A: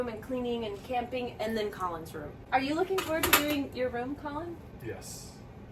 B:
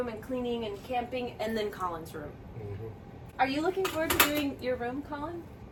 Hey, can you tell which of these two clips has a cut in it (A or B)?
A